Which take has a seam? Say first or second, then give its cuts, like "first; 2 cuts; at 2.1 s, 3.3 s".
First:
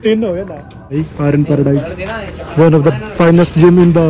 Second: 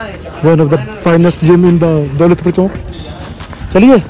first; 1 cut; at 0.9 s